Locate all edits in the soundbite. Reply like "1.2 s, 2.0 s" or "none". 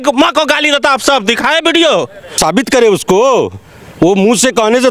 2.4 s

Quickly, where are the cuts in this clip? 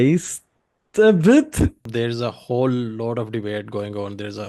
1.8 s

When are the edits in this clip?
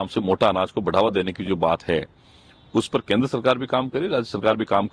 none

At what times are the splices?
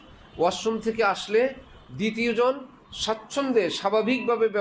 none

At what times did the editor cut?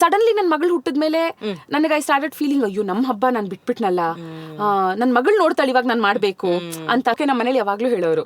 7.2 s

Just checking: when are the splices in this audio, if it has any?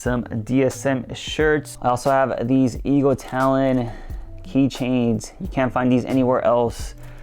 1.7 s

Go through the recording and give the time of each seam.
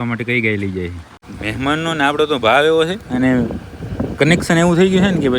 1.3 s

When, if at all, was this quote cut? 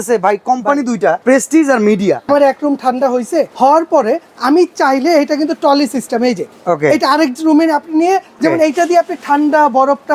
1.2 s, 2.3 s, 3.5 s, 8.4 s

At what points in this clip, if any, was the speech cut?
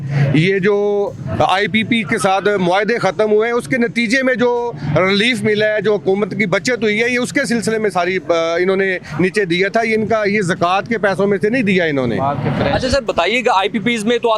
none

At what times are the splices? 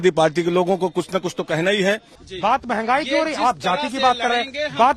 2.2 s

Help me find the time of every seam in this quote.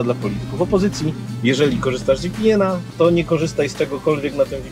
none

